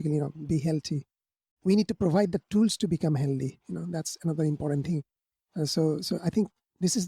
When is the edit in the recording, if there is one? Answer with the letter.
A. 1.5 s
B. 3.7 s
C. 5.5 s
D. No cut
A